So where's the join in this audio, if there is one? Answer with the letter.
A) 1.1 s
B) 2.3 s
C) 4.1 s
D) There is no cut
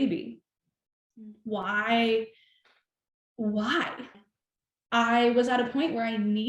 C